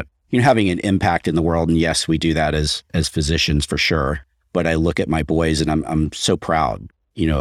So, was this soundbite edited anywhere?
no; 0 cuts

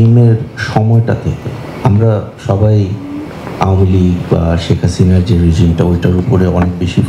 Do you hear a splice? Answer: no; 0 cuts

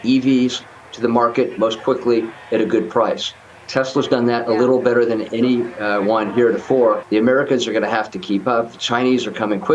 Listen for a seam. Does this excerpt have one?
yes; 1 cut; at 7.0 s

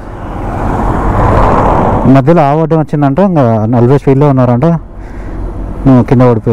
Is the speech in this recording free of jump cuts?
yes; 0 cuts

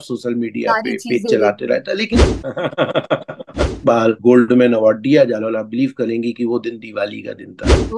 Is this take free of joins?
no; 2 cuts; at 2.3 s, 4.0 s

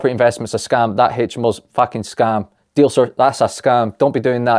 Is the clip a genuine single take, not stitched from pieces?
yes; 0 cuts

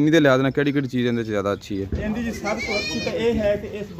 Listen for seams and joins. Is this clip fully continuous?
yes; 0 cuts

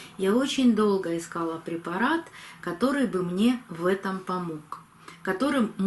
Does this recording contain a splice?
no; 0 cuts

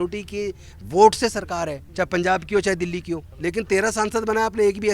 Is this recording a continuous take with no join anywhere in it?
no; 2 cuts; at 1.8 s, 3.3 s

